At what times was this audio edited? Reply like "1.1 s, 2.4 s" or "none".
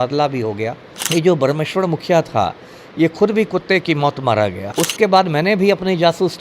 0.9 s, 4.6 s